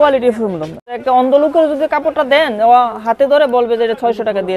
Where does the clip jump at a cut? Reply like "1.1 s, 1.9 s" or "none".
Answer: 0.9 s

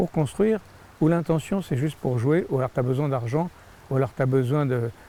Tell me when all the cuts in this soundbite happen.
none

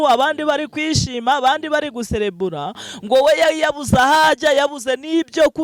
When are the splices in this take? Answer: none

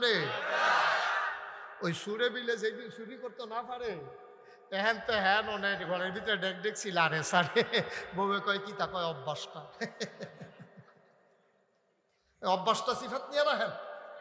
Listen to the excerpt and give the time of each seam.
none

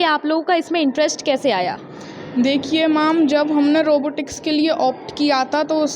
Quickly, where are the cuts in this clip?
none

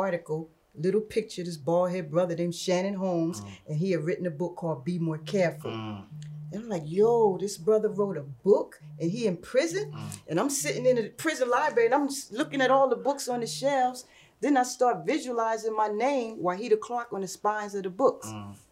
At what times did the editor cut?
none

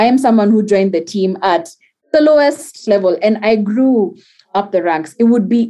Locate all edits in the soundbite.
2.8 s

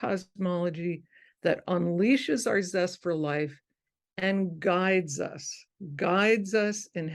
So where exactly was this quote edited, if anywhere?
none

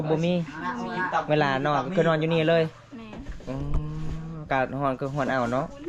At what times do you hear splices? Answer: none

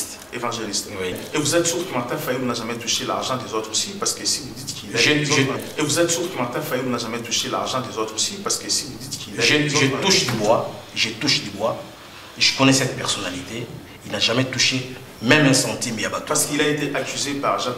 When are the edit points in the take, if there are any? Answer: 1.2 s, 5.6 s

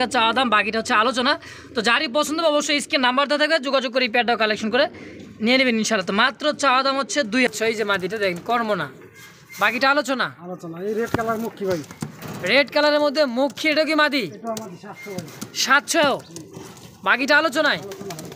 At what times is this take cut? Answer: 7.5 s

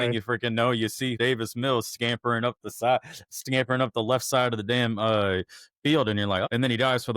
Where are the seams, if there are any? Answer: 1.2 s, 6.5 s

